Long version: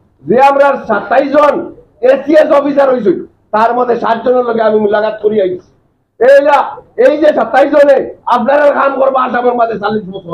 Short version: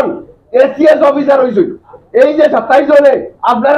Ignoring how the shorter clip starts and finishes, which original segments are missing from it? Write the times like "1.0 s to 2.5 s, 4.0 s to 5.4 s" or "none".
3.4 s to 6.8 s